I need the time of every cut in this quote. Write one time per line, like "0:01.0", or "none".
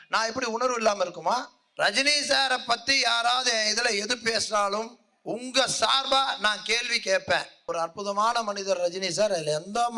0:01.6
0:07.6